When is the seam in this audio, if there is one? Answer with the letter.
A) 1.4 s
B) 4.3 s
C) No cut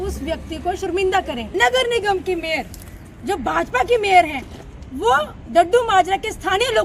A